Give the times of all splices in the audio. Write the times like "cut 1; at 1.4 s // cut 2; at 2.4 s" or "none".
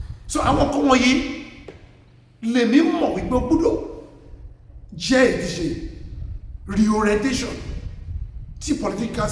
none